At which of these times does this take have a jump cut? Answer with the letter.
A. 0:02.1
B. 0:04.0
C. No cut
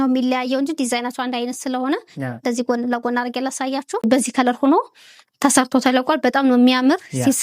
B